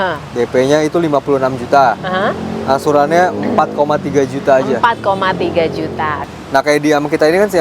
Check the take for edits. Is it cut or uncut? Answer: cut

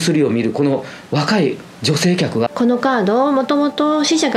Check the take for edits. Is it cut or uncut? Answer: cut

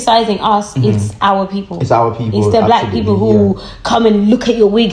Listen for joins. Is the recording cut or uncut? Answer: uncut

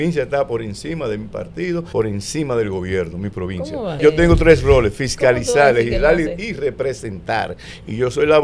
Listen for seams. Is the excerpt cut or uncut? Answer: cut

